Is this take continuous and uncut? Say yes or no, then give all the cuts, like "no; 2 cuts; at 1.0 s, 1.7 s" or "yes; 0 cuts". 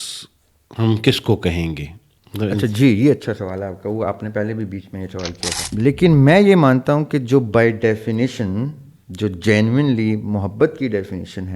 no; 1 cut; at 5.6 s